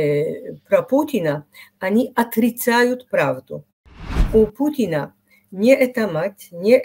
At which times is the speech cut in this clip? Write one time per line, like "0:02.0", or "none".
0:03.9